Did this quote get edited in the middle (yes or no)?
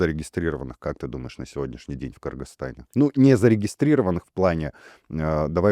no